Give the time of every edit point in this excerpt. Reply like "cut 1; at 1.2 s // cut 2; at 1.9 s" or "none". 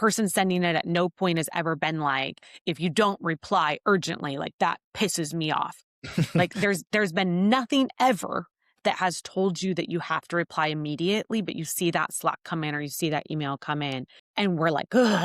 cut 1; at 14.2 s

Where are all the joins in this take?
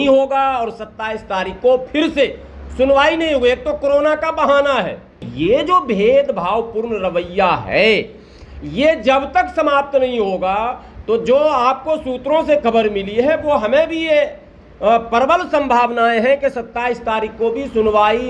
cut 1; at 5.2 s

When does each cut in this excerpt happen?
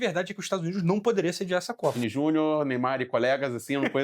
cut 1; at 1.9 s

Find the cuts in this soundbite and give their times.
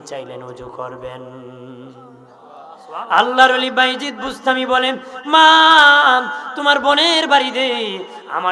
cut 1; at 2.8 s

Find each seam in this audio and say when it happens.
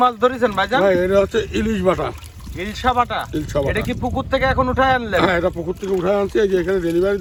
none

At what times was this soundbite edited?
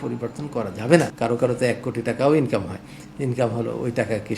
cut 1; at 1.1 s

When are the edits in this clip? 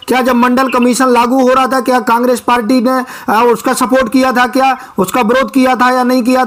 none

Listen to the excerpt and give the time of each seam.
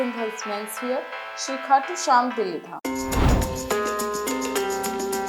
cut 1; at 2.7 s

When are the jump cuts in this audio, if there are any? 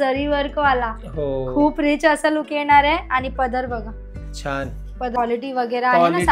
cut 1; at 5.2 s

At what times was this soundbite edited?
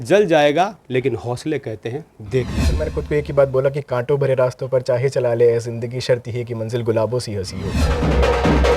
cut 1; at 3.0 s // cut 2; at 7.9 s

